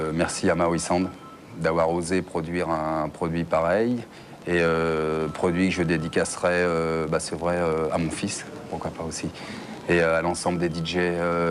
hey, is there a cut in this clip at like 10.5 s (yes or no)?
yes